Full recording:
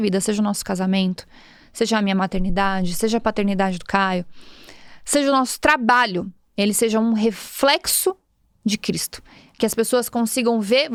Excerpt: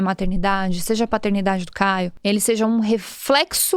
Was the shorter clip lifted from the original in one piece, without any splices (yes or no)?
no